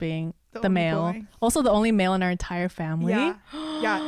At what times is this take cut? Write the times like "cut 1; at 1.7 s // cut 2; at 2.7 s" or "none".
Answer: none